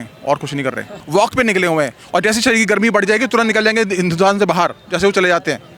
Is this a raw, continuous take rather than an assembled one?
no; 1 cut; at 1.0 s

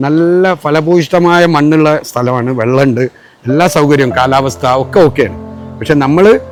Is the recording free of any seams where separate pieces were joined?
yes; 0 cuts

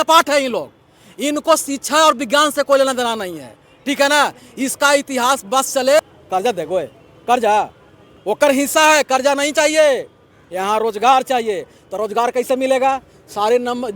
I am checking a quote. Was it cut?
yes; 1 cut; at 6.0 s

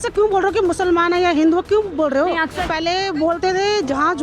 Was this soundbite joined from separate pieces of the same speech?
yes; 1 cut; at 2.6 s

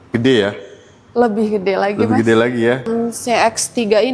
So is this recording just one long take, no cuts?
no; 1 cut; at 2.9 s

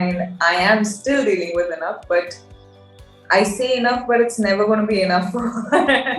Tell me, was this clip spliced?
no; 0 cuts

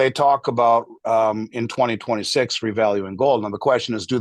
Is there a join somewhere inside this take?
no; 0 cuts

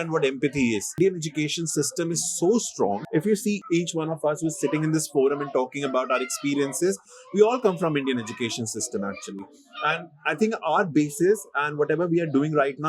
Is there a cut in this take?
yes; 2 cuts; at 0.9 s, 3.0 s

